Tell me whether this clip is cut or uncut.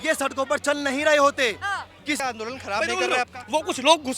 cut